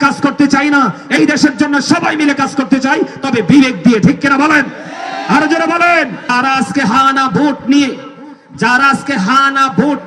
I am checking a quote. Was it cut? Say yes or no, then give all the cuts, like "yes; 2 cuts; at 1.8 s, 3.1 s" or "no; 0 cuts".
yes; 1 cut; at 6.3 s